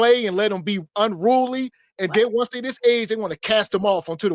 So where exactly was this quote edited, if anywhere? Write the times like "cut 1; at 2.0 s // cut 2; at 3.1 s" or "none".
none